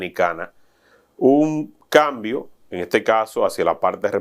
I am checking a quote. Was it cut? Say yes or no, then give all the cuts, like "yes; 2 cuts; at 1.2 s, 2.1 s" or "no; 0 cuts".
no; 0 cuts